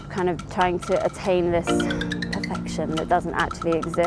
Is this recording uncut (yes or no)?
yes